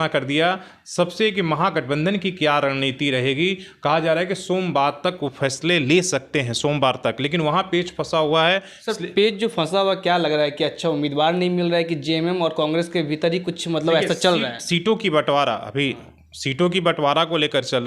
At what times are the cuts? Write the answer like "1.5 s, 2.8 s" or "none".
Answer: none